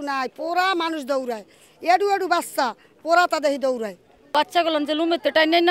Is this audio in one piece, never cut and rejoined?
no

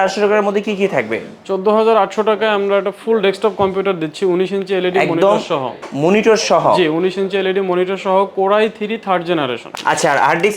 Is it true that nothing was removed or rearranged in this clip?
no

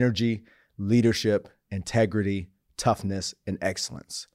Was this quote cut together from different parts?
no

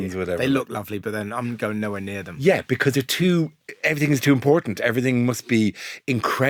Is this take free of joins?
yes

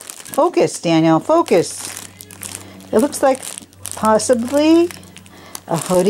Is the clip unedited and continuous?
yes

